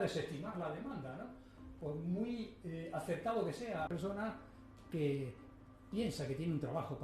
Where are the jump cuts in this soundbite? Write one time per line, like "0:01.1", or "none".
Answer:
0:03.9